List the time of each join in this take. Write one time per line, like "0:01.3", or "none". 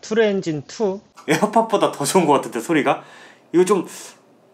0:01.1